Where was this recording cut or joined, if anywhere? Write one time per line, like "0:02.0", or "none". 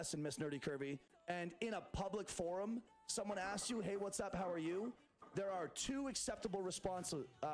0:01.1